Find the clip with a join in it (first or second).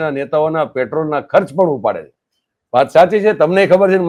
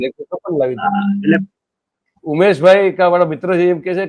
second